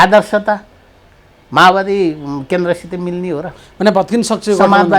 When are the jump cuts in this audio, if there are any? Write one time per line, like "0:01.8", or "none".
none